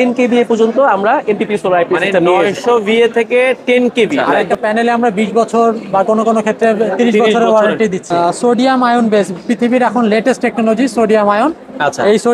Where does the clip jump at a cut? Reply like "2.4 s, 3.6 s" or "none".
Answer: 4.4 s, 8.4 s